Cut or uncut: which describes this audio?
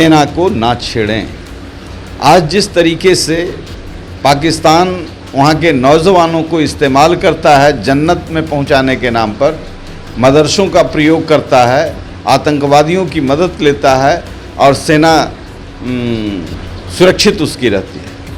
uncut